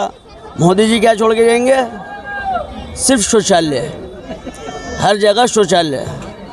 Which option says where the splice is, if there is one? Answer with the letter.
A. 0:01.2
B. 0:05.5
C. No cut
C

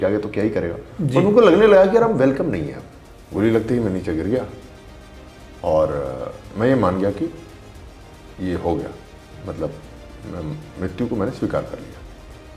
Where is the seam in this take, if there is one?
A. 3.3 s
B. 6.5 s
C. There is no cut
A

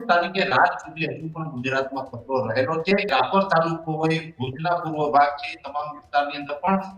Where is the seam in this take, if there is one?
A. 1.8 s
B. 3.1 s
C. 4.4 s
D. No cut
B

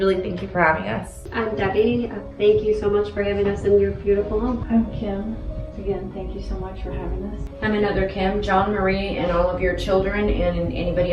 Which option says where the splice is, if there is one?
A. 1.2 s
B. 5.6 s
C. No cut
A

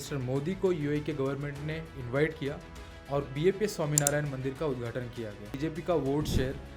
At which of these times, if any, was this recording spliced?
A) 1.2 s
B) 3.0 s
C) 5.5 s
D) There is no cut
C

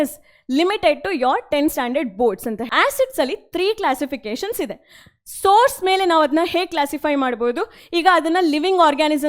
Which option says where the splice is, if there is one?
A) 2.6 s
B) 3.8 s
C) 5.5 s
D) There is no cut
A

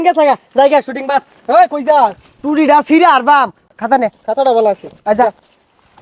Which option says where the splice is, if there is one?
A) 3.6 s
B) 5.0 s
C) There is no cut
A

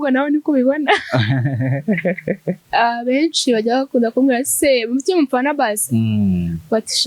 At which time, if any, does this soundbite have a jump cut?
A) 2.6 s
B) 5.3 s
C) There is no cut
A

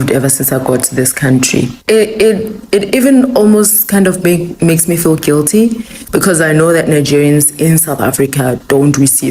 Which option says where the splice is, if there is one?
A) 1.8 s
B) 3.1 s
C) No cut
A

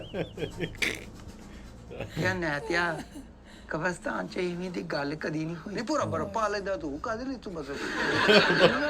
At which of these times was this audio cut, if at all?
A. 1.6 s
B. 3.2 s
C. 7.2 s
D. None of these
D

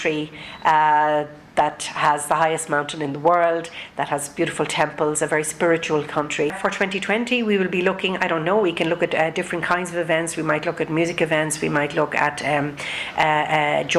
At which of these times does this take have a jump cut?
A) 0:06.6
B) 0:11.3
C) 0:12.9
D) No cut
A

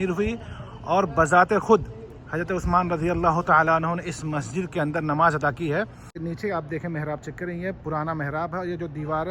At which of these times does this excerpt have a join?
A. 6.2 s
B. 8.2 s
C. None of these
A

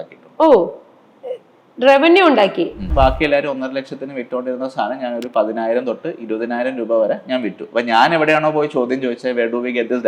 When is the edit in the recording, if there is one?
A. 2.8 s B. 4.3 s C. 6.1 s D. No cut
A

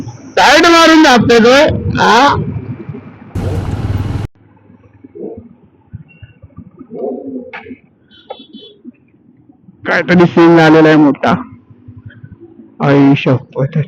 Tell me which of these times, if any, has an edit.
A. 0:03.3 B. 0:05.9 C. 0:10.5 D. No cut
A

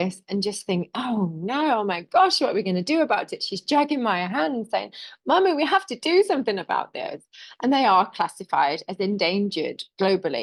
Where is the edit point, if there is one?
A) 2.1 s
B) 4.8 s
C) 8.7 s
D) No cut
D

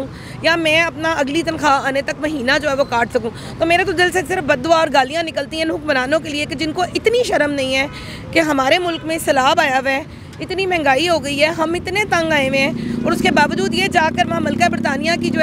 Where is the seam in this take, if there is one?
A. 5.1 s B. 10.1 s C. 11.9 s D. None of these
D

